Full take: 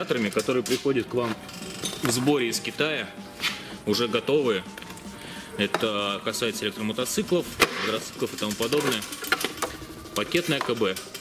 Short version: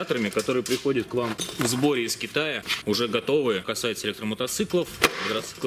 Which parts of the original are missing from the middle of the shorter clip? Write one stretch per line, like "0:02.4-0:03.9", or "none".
0:01.4-0:01.9
0:03.1-0:03.7
0:04.7-0:06.3